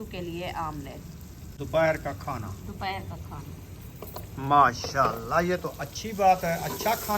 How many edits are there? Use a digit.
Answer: 1